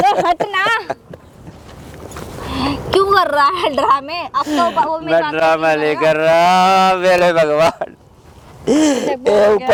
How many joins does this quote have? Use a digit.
0